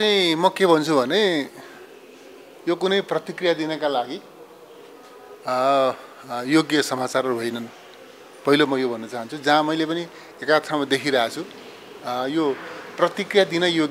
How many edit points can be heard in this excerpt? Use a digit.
0